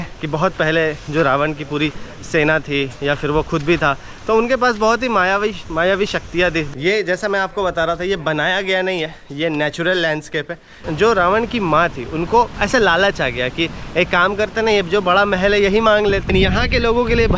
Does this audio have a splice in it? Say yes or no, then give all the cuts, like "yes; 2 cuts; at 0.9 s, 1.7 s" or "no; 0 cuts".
yes; 3 cuts; at 6.7 s, 10.8 s, 16.3 s